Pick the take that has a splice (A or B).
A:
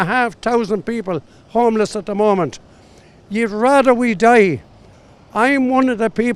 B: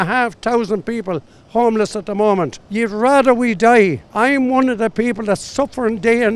B